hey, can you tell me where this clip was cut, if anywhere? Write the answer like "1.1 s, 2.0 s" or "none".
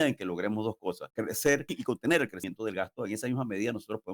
1.1 s, 1.7 s, 2.4 s